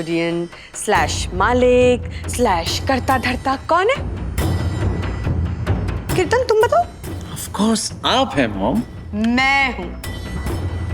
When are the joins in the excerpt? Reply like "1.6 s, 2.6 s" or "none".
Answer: 6.2 s